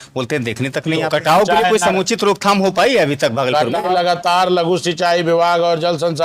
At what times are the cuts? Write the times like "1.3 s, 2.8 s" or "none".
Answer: 1.0 s, 3.8 s